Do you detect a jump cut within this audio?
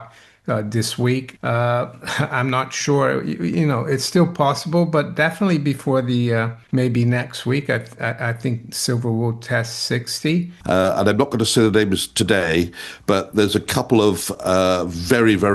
yes; 3 cuts; at 1.3 s, 6.6 s, 10.5 s

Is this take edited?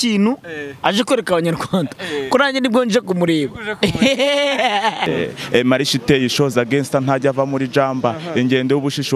yes; 1 cut; at 5.1 s

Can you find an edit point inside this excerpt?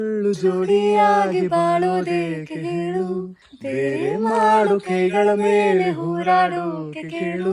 no; 0 cuts

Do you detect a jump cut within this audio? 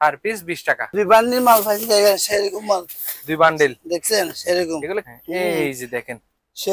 yes; 2 cuts; at 0.9 s, 5.1 s

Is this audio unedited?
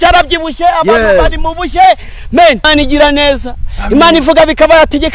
no; 1 cut; at 2.6 s

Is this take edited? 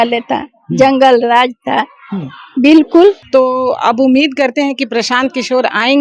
yes; 1 cut; at 3.2 s

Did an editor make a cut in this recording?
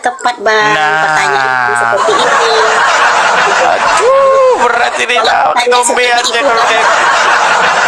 no; 0 cuts

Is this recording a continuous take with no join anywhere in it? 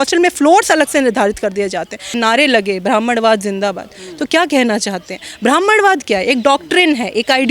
no; 1 cut; at 2.2 s

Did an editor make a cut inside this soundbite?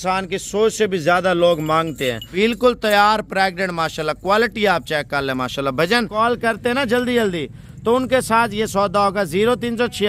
yes; 2 cuts; at 2.3 s, 6.1 s

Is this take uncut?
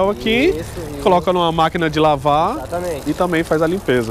yes; 0 cuts

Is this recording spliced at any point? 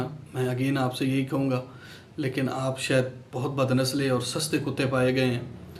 no; 0 cuts

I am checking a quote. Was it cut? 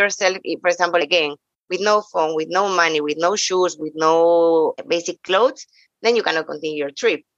yes; 2 cuts; at 1.0 s, 4.8 s

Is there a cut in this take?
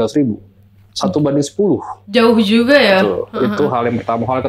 no; 0 cuts

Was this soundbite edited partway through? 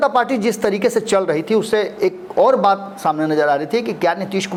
no; 0 cuts

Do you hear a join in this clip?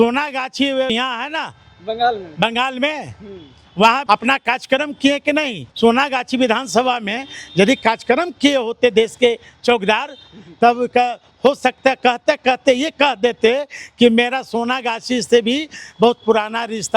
yes; 3 cuts; at 0.9 s, 4.0 s, 5.6 s

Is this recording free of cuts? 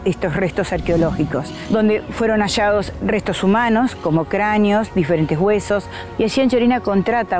no; 3 cuts; at 1.5 s, 2.9 s, 6.0 s

